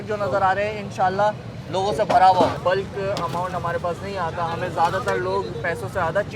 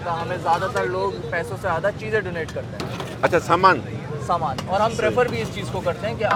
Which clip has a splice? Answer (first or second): first